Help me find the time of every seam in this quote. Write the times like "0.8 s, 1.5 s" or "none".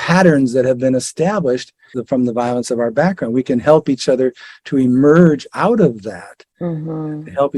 1.9 s